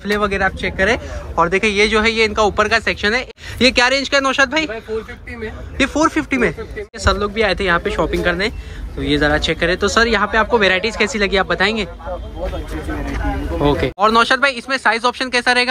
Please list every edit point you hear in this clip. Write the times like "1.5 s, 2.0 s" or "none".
3.3 s, 7.0 s, 13.9 s